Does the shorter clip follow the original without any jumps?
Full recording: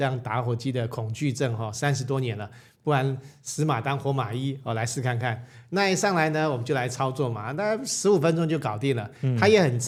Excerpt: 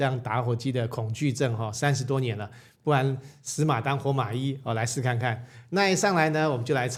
yes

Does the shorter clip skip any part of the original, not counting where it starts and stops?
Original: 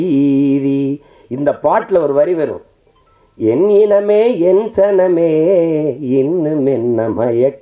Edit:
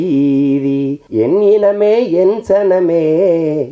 yes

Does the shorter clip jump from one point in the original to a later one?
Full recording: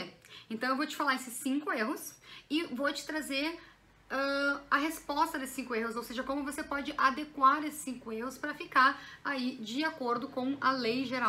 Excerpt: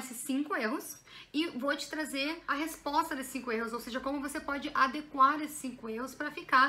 yes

